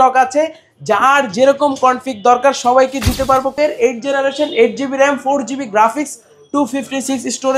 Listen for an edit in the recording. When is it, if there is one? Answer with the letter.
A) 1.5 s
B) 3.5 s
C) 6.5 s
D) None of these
B